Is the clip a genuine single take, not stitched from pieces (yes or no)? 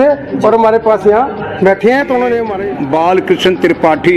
no